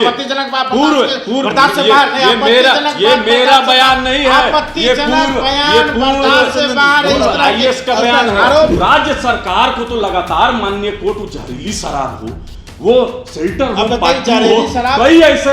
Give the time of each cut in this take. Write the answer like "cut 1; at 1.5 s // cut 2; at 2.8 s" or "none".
cut 1; at 8.7 s